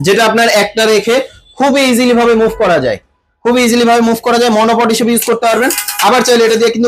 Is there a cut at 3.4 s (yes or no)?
no